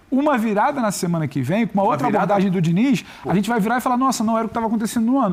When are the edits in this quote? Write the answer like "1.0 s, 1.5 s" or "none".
none